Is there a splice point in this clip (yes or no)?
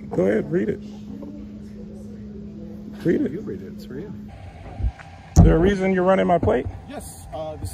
yes